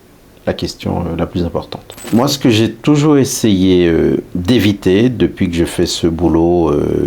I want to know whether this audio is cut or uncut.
cut